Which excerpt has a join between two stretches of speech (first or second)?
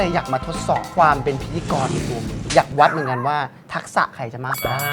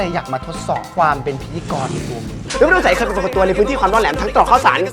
second